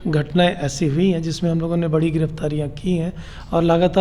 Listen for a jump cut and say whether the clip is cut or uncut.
uncut